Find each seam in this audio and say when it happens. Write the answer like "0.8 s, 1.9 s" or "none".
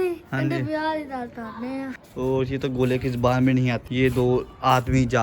2.0 s, 3.8 s